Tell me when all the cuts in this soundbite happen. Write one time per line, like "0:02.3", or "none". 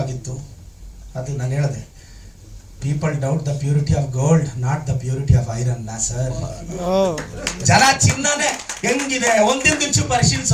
none